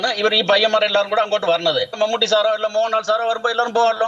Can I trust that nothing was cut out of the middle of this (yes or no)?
no